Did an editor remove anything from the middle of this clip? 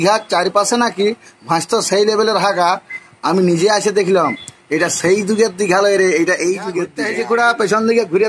yes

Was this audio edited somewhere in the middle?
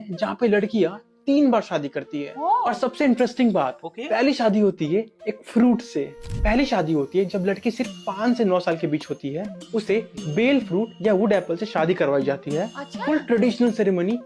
no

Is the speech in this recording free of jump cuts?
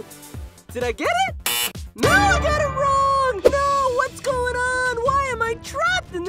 no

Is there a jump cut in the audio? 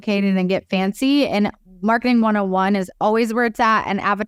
no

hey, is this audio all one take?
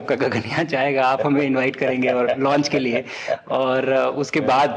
yes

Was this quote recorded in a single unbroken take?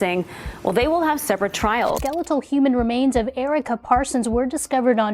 no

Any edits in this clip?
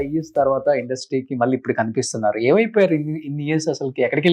no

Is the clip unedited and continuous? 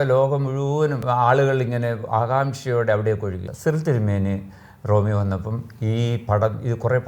no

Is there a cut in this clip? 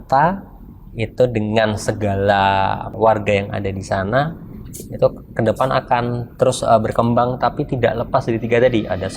yes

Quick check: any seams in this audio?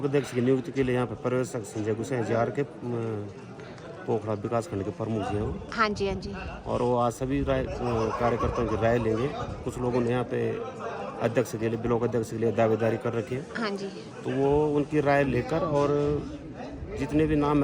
no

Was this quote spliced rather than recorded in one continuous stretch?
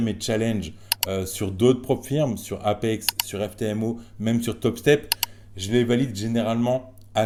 no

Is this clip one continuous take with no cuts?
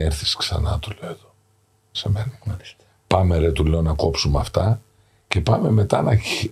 yes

